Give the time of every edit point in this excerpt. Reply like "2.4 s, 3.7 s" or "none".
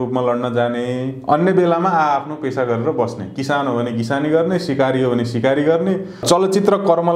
6.2 s